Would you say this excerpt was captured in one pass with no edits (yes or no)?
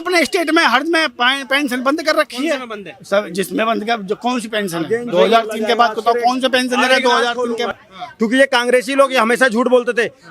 no